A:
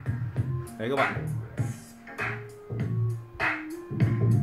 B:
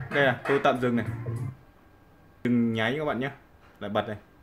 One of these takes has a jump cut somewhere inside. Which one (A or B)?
B